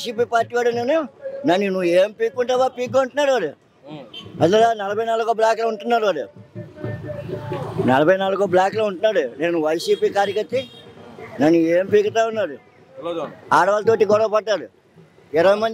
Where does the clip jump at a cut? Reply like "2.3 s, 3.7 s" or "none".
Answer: none